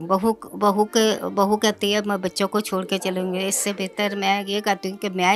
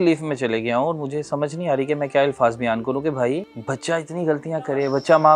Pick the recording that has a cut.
second; 1 cut; at 3.5 s

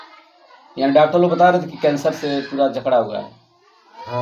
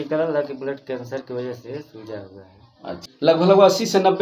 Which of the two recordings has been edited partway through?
second; 1 cut; at 3.0 s

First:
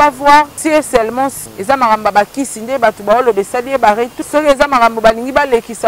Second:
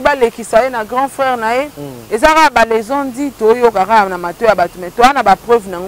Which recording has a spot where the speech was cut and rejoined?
first; 2 cuts; at 1.0 s, 4.2 s

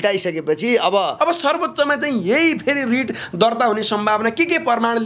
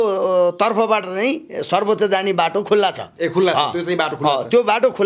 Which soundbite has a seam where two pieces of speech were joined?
first; 1 cut; at 1.1 s

